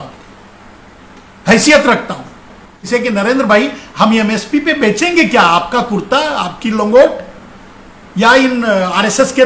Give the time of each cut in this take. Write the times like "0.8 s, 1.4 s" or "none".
2.9 s